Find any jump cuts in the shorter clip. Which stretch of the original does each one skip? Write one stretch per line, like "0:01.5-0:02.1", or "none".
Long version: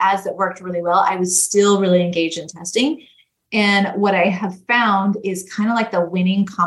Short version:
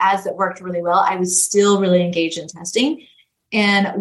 none